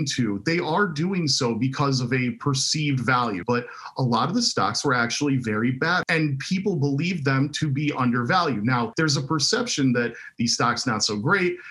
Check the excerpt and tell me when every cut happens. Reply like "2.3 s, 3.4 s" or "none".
3.4 s, 6.0 s, 8.9 s